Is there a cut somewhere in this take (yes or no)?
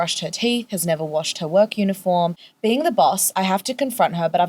yes